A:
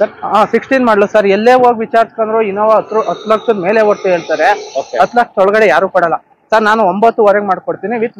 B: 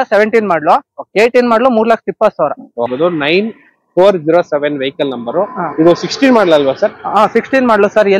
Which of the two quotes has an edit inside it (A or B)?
B